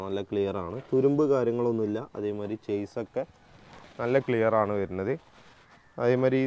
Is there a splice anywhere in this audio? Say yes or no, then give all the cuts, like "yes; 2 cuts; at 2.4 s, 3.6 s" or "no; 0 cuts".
no; 0 cuts